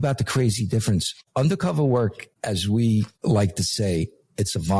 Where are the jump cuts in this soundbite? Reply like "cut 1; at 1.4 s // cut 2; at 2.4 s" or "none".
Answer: cut 1; at 1.2 s // cut 2; at 2.3 s // cut 3; at 3.1 s